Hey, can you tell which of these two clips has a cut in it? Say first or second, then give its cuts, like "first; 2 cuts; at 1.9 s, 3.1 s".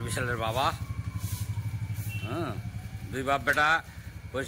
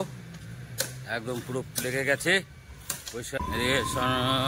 second; 1 cut; at 3.4 s